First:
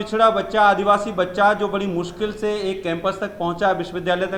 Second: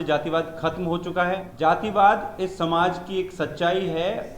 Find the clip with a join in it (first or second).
second